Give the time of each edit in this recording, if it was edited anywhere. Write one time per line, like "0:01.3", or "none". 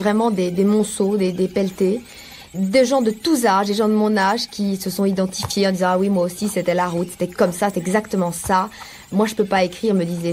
0:02.5
0:07.3
0:09.1